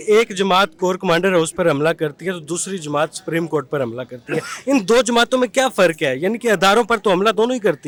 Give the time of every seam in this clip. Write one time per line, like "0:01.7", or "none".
none